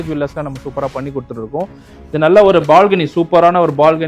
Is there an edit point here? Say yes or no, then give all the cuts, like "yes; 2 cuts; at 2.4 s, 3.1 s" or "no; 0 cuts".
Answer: yes; 1 cut; at 1.9 s